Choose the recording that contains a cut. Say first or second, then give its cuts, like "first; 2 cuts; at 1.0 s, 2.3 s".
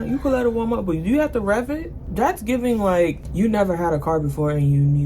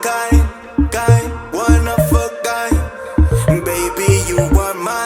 first; 2 cuts; at 2.0 s, 3.2 s